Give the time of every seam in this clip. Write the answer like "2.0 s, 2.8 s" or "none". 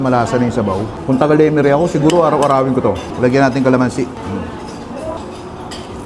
0.9 s, 3.1 s, 4.2 s, 5.2 s